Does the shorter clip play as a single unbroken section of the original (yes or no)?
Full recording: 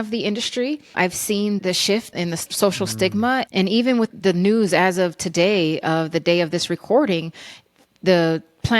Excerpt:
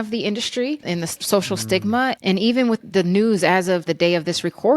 no